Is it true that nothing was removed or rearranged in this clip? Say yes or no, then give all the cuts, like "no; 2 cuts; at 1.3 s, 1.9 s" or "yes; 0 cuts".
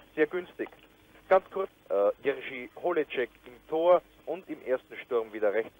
no; 1 cut; at 1.8 s